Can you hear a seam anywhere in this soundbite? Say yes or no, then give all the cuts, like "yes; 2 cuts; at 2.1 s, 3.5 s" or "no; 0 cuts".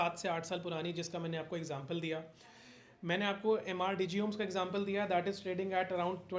no; 0 cuts